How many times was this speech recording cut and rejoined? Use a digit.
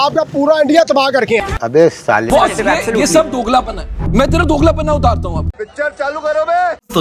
0